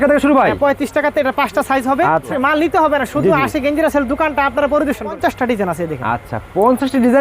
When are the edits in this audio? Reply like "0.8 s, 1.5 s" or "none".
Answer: 2.3 s, 5.2 s